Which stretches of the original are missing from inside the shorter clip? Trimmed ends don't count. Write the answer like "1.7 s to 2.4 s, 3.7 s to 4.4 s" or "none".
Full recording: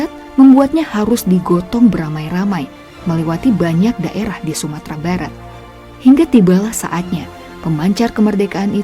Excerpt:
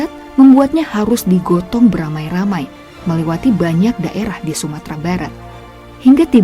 none